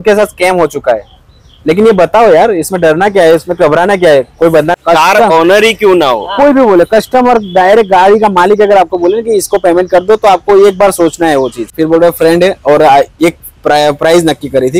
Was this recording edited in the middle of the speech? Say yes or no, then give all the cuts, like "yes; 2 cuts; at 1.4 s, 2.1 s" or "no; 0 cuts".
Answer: yes; 2 cuts; at 4.7 s, 11.7 s